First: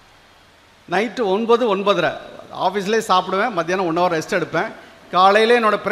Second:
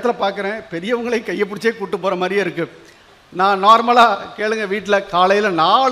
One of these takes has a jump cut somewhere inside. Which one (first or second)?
second